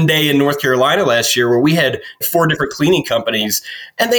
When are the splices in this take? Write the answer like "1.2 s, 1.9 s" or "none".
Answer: 2.2 s